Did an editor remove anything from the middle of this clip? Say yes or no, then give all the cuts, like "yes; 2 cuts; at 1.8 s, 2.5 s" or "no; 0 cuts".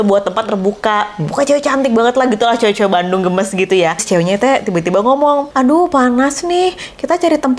yes; 2 cuts; at 4.0 s, 5.5 s